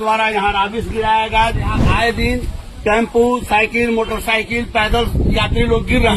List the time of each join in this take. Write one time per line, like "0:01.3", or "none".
0:01.8